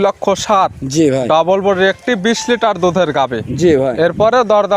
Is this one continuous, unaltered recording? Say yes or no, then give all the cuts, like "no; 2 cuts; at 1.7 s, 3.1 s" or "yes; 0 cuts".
yes; 0 cuts